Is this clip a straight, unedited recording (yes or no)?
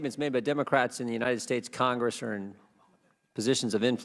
yes